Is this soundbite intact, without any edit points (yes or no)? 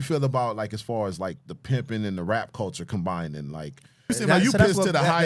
no